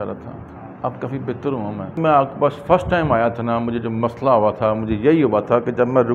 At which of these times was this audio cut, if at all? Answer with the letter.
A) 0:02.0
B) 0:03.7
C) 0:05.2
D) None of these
A